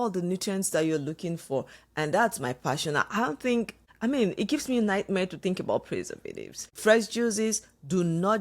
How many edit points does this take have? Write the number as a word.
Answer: two